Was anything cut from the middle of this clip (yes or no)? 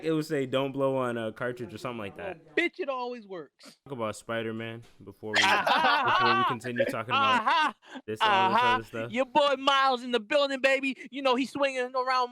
yes